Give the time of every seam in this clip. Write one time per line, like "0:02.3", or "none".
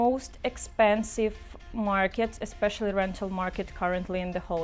none